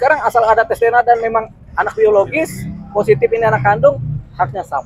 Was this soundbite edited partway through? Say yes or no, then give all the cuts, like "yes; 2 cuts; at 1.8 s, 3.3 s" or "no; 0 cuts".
no; 0 cuts